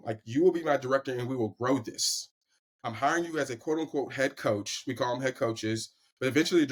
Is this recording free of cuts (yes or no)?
yes